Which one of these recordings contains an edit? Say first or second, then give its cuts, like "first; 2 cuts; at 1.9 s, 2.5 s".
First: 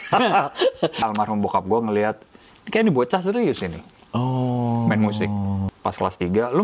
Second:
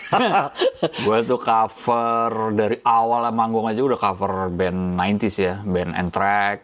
first; 2 cuts; at 1.0 s, 5.7 s